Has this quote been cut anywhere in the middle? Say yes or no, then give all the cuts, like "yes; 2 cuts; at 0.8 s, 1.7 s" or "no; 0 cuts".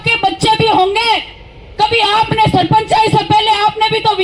no; 0 cuts